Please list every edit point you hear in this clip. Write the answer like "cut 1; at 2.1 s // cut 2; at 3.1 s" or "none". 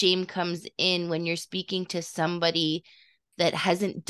none